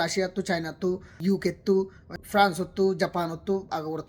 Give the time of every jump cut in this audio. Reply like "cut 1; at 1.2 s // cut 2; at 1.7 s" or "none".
cut 1; at 1.1 s // cut 2; at 2.0 s